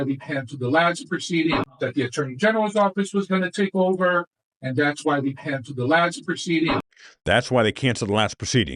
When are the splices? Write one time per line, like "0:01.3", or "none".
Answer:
0:01.7